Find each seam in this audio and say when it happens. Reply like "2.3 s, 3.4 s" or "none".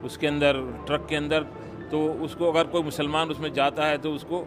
none